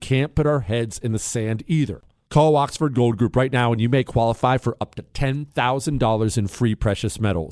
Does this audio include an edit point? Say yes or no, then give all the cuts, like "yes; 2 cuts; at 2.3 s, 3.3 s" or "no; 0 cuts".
yes; 1 cut; at 2.0 s